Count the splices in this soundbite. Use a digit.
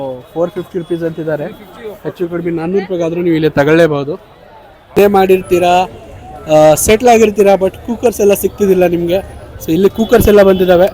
1